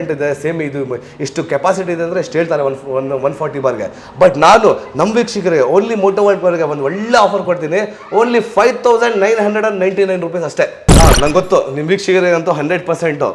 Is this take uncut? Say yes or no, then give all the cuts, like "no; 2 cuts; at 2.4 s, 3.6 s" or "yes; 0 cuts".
no; 1 cut; at 10.9 s